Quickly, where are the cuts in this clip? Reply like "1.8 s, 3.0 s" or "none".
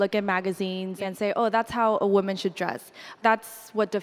1.0 s, 3.1 s